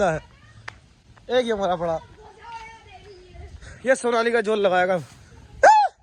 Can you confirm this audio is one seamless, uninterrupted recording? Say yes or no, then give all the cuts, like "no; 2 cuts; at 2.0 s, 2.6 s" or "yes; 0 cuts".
yes; 0 cuts